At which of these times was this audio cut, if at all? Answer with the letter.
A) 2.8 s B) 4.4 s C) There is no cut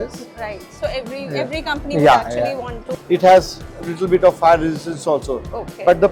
A